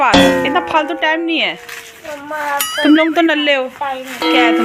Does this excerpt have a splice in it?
no; 0 cuts

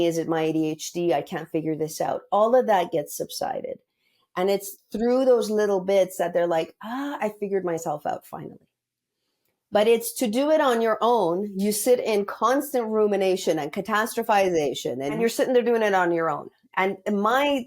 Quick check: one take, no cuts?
no; 1 cut; at 15.2 s

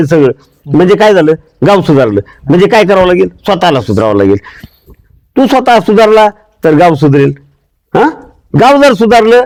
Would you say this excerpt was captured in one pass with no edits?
yes; 0 cuts

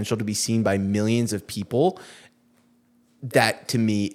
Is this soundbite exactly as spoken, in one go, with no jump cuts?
yes; 0 cuts

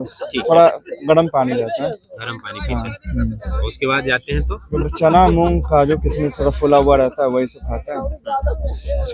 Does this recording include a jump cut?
no; 0 cuts

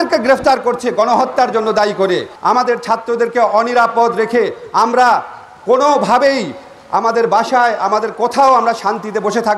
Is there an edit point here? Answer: yes; 1 cut; at 2.3 s

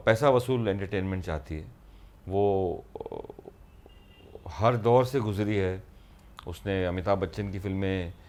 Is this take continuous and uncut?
yes; 0 cuts

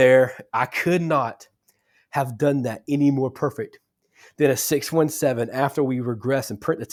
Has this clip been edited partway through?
no; 0 cuts

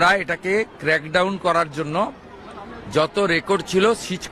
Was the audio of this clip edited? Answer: no; 0 cuts

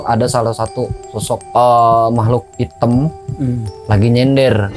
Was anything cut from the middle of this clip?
yes; 3 cuts; at 1.4 s, 2.5 s, 3.7 s

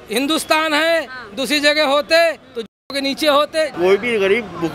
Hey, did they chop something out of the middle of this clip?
yes; 1 cut; at 3.7 s

